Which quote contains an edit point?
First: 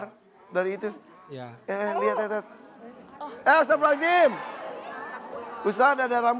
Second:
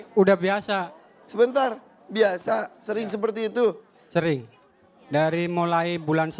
first; 1 cut; at 4.6 s

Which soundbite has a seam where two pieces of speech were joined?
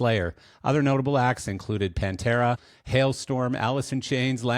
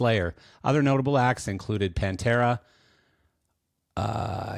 first; 1 cut; at 2.7 s

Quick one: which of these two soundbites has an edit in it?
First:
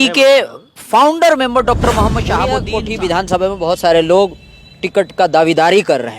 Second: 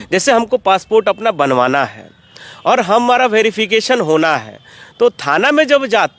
first; 1 cut; at 2.6 s

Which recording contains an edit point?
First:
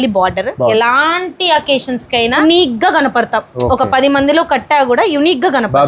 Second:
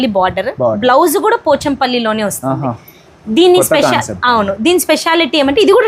first; 2 cuts; at 0.7 s, 2.4 s

